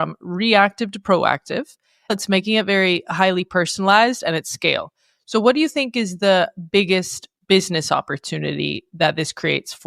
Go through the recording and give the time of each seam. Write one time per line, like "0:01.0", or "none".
0:02.1